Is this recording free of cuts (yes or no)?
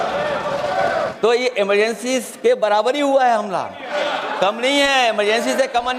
no